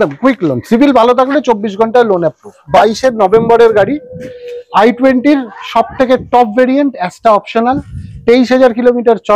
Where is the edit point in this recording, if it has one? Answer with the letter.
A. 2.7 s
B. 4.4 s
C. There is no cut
A